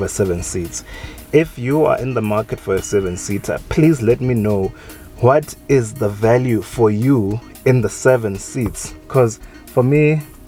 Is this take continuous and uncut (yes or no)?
yes